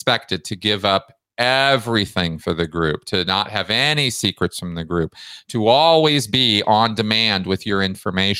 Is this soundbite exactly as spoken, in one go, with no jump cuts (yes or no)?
yes